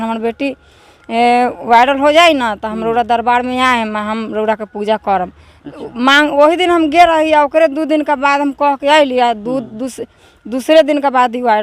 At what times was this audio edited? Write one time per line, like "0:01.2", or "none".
none